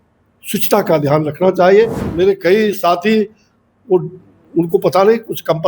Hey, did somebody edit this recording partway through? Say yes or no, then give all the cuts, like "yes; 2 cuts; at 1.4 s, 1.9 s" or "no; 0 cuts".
yes; 1 cut; at 2.0 s